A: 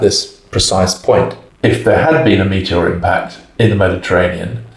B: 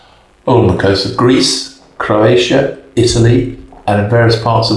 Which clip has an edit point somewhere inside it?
A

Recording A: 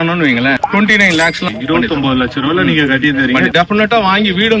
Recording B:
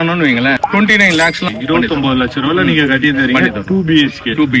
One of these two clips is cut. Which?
A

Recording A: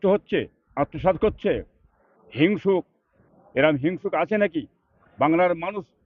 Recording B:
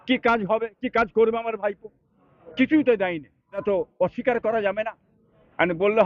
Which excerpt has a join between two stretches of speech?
B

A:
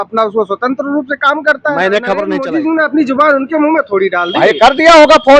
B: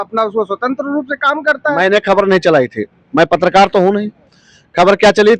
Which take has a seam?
A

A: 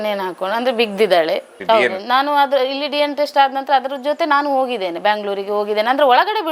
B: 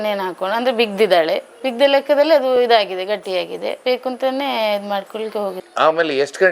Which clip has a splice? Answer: A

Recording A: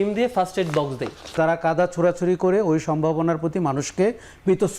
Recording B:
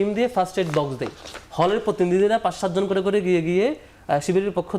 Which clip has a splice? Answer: A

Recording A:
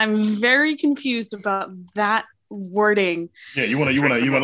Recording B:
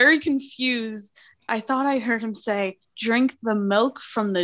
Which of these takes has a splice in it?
B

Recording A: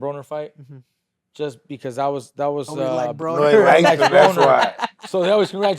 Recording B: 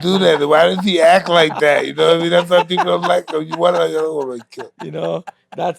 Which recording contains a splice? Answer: A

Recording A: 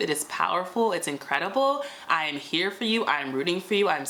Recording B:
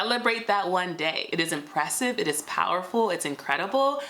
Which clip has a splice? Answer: B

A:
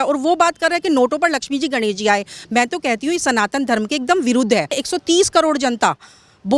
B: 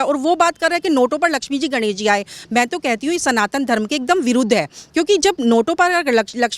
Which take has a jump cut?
A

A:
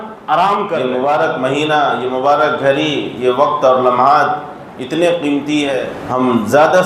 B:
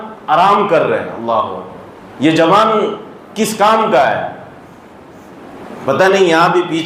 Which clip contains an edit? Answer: A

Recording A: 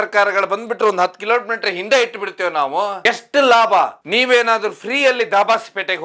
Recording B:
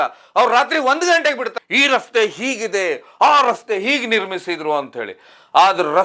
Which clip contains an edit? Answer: A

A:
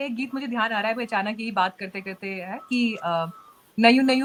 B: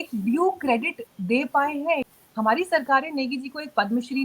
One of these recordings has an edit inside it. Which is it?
B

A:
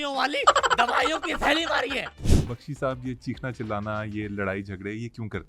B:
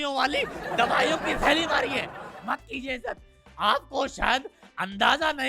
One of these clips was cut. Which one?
A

